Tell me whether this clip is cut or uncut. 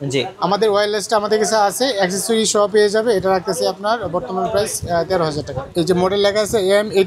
cut